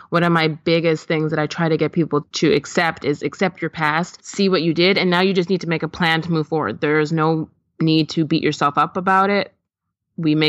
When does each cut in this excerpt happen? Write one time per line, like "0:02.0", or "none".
0:02.3
0:04.2